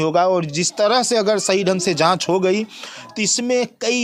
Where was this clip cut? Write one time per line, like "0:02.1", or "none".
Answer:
none